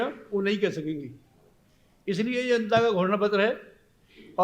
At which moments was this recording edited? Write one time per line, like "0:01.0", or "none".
none

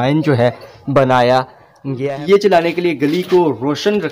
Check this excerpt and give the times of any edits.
0:02.0

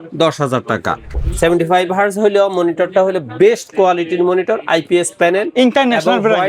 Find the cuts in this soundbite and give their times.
0:01.2

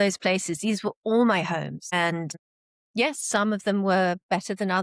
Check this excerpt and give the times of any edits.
none

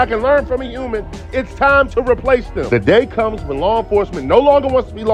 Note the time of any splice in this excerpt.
none

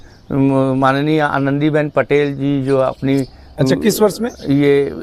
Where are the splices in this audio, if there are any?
none

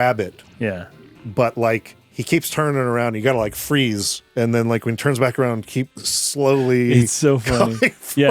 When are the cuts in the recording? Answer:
0:04.2
0:05.9

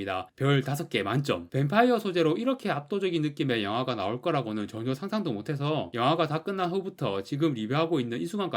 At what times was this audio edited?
0:01.5

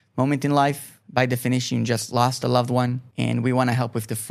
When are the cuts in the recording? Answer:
0:00.9
0:03.0

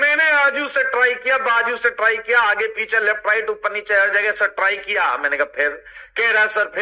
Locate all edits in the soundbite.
none

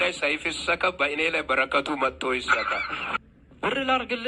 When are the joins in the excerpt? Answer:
0:03.1

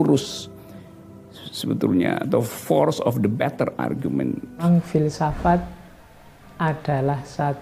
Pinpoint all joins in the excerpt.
0:04.6

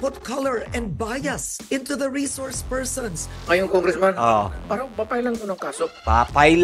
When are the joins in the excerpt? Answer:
0:03.3
0:04.6

